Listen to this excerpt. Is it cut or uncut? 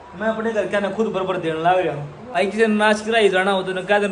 cut